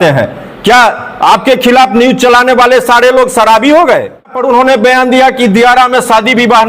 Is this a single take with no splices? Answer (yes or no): no